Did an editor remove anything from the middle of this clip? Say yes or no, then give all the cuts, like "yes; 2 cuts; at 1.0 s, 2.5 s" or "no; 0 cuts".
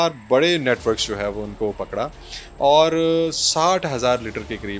no; 0 cuts